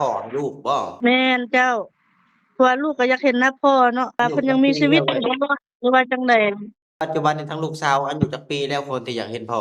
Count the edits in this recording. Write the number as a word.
three